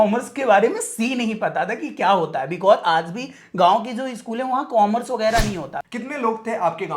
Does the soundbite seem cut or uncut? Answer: cut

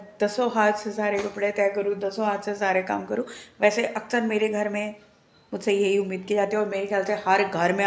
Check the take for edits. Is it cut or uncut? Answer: uncut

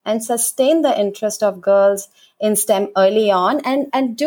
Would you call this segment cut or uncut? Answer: uncut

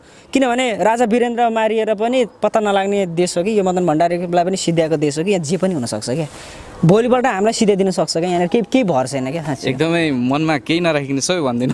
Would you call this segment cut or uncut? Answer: uncut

